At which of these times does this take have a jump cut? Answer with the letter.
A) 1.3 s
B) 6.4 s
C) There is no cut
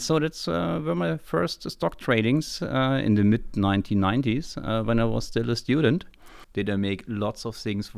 B